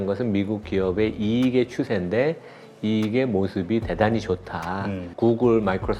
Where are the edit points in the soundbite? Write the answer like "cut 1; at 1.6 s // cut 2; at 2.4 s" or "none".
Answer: cut 1; at 5.1 s